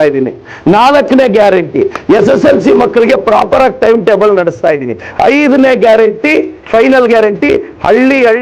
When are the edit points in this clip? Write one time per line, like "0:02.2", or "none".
none